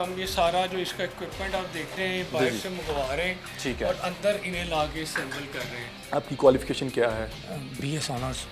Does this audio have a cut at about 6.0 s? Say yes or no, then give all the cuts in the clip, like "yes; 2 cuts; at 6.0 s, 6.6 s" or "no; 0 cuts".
yes; 1 cut; at 6.0 s